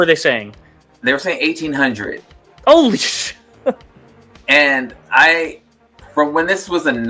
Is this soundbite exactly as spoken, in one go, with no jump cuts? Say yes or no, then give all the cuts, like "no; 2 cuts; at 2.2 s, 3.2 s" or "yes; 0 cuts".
yes; 0 cuts